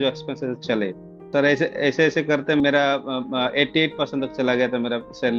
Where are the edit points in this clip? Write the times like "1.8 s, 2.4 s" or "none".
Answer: 1.2 s, 2.6 s